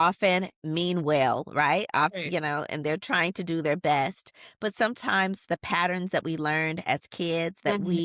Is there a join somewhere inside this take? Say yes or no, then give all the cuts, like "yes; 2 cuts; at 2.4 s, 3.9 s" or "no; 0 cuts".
no; 0 cuts